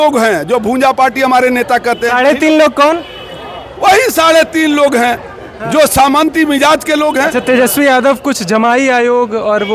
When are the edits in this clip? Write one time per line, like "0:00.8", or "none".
0:07.3